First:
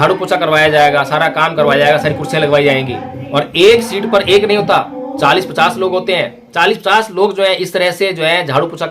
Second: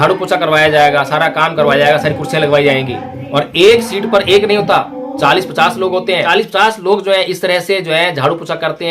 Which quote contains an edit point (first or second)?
second